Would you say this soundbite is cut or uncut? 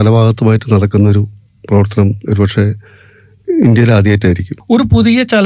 cut